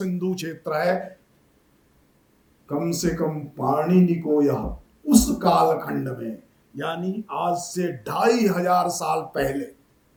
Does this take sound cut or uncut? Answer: uncut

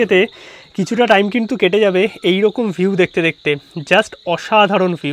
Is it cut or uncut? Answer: uncut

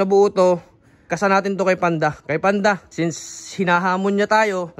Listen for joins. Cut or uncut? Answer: cut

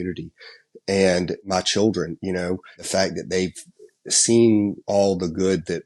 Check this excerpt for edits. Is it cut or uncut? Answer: cut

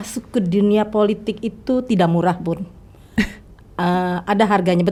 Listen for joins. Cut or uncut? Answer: uncut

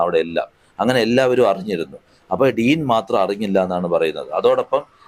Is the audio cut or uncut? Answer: uncut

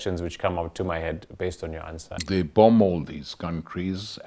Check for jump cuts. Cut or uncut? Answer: cut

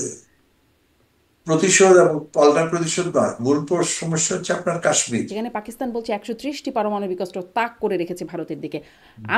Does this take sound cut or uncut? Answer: cut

